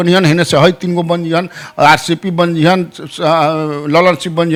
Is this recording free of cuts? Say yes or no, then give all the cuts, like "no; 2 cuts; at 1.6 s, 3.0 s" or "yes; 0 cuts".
yes; 0 cuts